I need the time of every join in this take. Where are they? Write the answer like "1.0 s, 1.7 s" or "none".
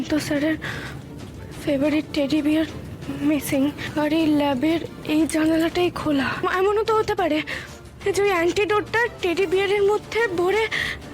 3.8 s, 4.9 s, 6.4 s, 9.1 s